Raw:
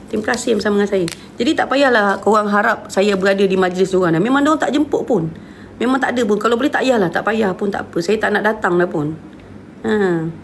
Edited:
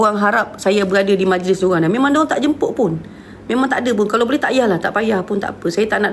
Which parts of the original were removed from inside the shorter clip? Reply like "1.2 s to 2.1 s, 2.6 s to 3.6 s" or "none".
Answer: none

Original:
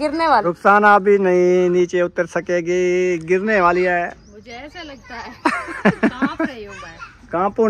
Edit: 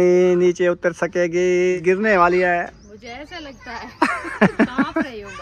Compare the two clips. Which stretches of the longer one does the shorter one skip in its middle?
3.1 s to 3.2 s

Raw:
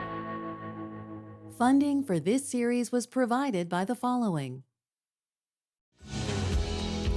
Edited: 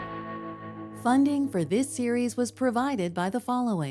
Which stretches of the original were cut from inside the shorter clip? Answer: 0.9 s to 1.5 s

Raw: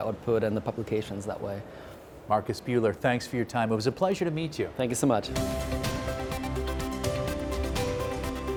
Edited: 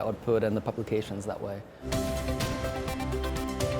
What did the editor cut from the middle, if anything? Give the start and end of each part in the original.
1.8 s to 5.3 s

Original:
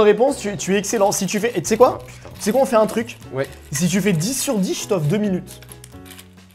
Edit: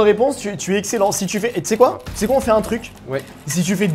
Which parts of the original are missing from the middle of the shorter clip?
2.1 s to 2.3 s

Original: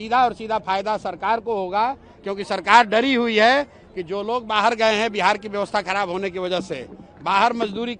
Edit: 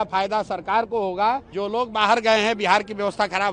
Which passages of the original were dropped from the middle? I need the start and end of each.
2.1 s to 4.1 s

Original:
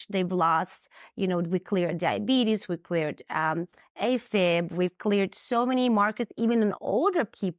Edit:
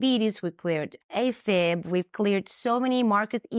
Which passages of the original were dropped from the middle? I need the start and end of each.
3.2 s to 3.8 s

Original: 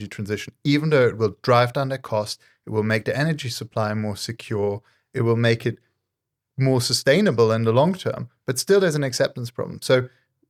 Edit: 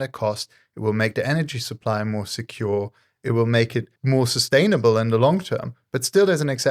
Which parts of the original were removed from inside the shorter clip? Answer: 5.8 s to 6.5 s

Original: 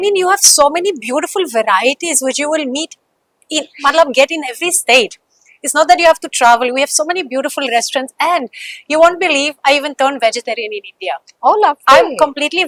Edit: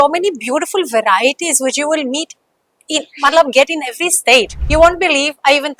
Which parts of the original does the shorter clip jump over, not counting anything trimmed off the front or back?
5.2 s to 8.8 s

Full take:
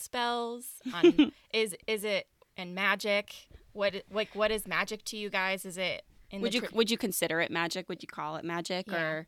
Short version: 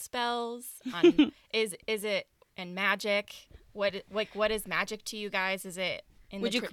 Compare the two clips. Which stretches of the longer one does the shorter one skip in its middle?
none

